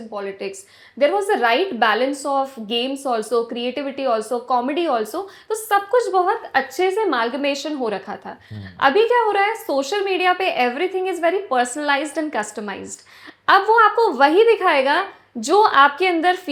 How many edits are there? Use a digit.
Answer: 0